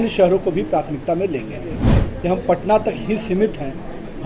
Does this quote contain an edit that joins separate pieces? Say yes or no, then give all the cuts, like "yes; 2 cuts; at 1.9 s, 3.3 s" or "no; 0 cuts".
yes; 1 cut; at 1.9 s